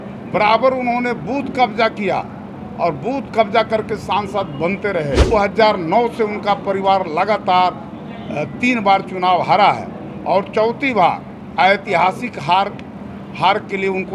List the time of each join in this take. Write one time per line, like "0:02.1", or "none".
0:05.3